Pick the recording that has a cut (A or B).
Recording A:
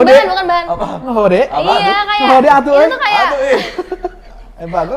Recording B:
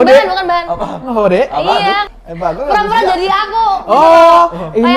B